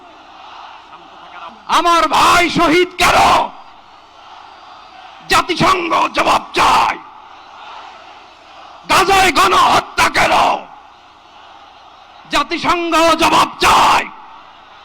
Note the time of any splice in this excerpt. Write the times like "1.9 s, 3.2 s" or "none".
1.5 s

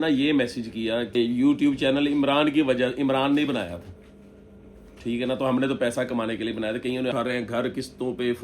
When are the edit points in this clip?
1.1 s, 7.1 s

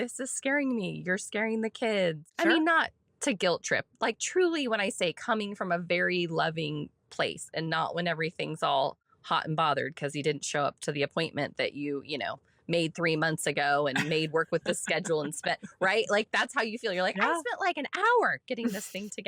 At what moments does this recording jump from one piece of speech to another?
2.3 s, 9.1 s

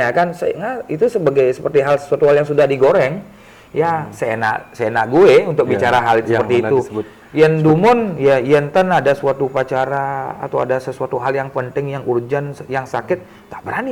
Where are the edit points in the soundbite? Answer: none

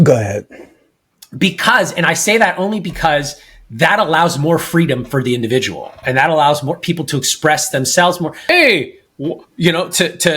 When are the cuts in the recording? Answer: 8.5 s

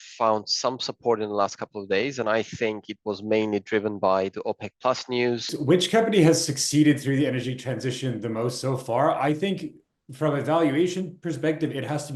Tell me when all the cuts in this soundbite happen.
5.5 s

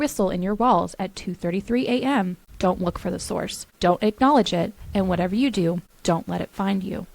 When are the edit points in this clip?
2.4 s, 3.6 s, 5.9 s

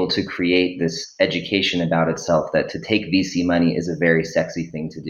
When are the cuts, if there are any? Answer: none

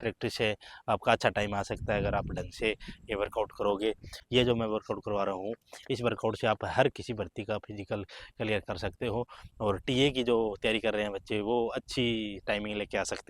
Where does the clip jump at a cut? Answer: 4.1 s

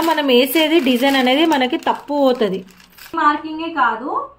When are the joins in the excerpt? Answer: 3.1 s

